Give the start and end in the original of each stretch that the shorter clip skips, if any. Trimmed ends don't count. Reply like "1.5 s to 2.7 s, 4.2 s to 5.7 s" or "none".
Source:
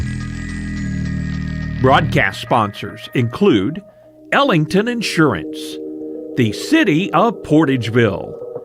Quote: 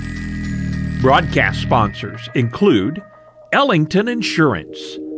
1.3 s to 1.8 s